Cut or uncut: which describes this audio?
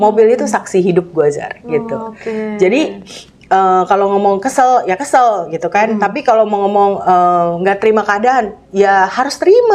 uncut